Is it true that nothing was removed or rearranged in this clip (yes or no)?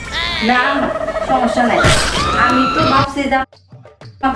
yes